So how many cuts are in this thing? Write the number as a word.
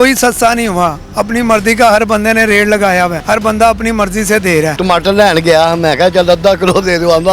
two